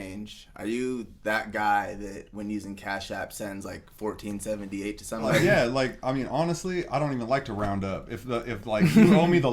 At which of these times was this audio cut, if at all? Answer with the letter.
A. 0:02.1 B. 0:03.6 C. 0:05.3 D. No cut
C